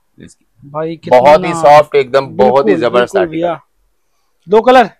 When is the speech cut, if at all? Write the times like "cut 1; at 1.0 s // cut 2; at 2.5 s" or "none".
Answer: none